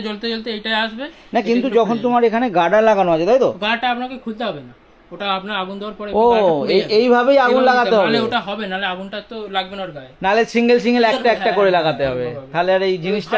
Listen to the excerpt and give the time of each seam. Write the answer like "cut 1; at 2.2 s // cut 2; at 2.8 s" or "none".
none